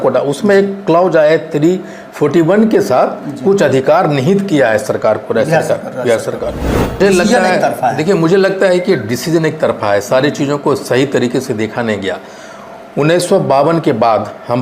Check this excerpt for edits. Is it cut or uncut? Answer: cut